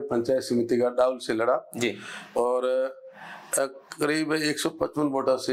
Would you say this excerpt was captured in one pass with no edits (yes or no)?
yes